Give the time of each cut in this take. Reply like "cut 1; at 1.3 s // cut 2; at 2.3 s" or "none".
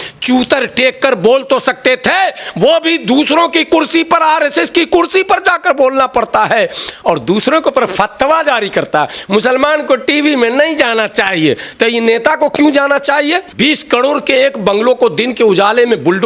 cut 1; at 13.5 s